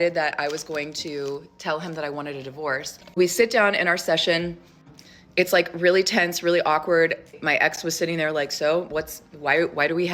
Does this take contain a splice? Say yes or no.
yes